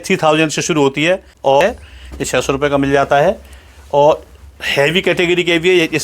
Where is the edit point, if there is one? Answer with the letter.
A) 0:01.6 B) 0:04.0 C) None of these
A